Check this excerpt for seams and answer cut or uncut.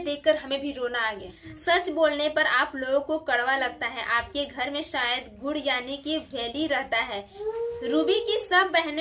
cut